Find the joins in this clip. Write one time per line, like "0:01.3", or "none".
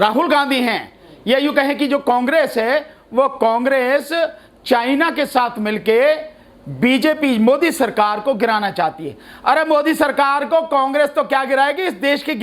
none